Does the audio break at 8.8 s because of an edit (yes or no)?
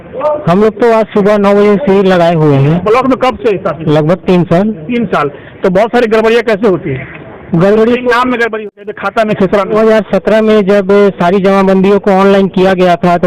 yes